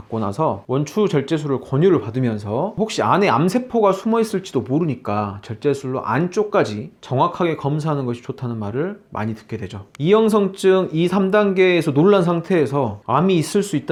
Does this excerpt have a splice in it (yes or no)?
no